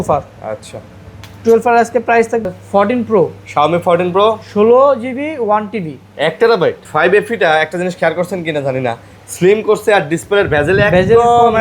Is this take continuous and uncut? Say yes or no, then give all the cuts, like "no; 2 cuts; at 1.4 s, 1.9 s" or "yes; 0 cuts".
no; 2 cuts; at 2.5 s, 6.8 s